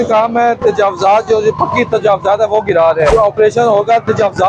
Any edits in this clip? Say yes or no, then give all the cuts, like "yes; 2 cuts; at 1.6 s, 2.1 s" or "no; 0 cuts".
yes; 1 cut; at 3.1 s